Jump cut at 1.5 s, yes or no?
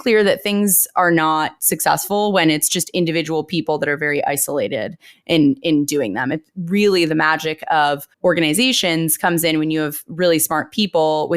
yes